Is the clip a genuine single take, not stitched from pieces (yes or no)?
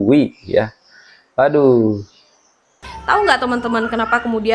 no